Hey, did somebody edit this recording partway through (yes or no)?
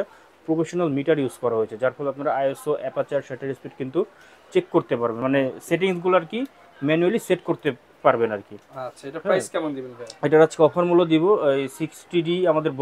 no